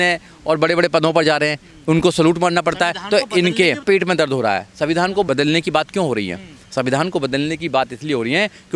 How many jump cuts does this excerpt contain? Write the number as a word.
zero